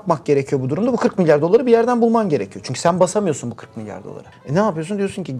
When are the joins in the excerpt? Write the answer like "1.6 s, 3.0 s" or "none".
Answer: none